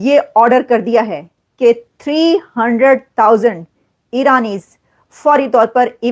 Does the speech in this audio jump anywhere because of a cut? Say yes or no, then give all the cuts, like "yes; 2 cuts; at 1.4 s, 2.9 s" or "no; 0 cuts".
no; 0 cuts